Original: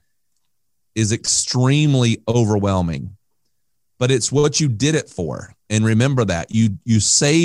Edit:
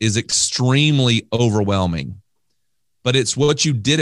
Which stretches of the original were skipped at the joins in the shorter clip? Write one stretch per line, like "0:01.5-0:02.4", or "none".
none